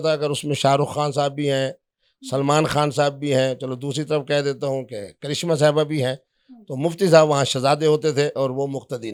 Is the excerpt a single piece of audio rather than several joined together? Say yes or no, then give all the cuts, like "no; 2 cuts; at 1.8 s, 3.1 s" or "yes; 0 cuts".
yes; 0 cuts